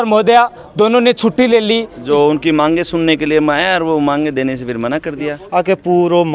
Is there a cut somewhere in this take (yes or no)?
yes